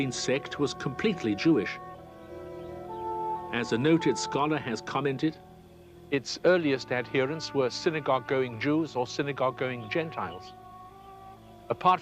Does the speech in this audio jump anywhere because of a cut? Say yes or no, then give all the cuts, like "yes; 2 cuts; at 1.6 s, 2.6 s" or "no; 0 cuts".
yes; 1 cut; at 2.7 s